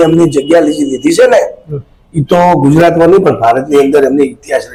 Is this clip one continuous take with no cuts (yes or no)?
yes